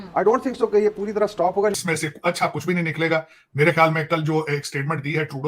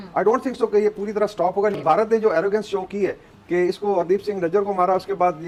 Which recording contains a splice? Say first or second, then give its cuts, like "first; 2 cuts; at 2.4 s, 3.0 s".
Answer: first; 1 cut; at 1.8 s